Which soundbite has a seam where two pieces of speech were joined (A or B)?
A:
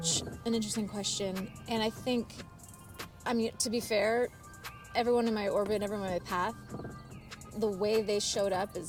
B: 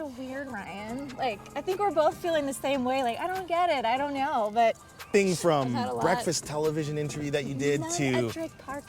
B